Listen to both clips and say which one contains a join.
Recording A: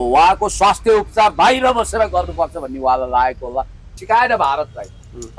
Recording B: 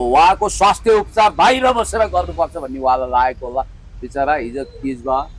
A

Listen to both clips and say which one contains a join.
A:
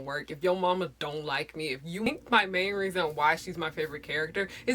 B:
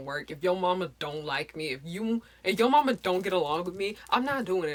A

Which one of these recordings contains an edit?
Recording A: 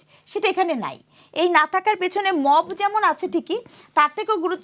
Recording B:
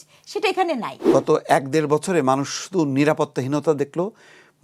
B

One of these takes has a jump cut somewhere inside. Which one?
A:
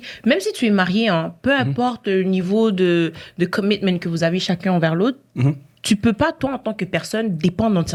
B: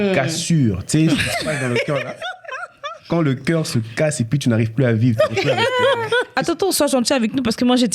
B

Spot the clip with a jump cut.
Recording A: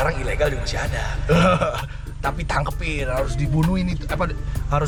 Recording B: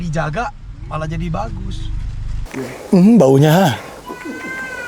B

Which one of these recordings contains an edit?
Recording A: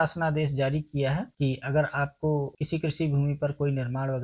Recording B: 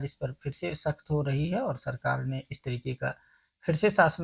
A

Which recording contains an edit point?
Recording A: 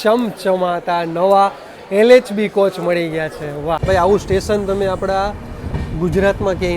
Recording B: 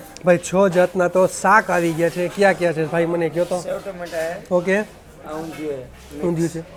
A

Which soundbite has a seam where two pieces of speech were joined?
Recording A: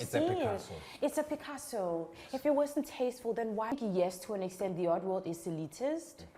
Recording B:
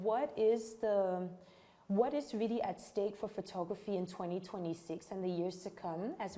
A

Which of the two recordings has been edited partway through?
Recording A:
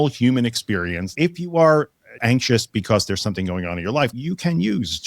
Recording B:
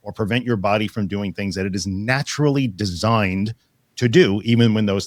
A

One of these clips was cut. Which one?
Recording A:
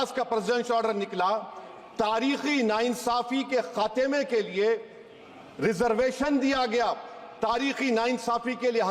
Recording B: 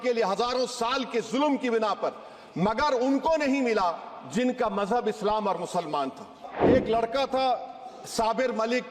B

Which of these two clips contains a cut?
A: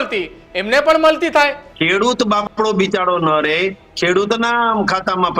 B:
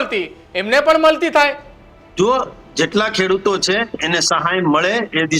A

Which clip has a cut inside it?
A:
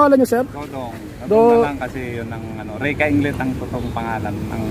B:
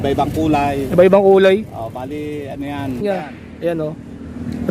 B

